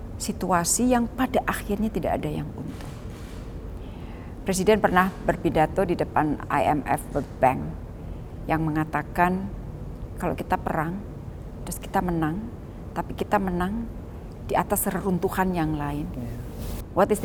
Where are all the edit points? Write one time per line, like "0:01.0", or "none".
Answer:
none